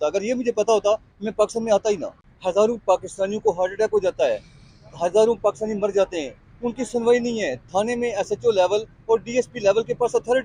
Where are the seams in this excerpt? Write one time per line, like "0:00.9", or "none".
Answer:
none